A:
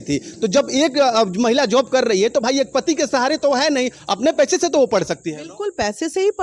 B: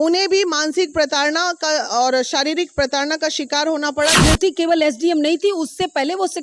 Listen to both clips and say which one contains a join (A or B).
B